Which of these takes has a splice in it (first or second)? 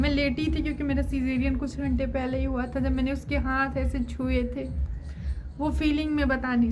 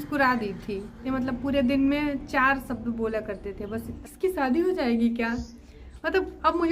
second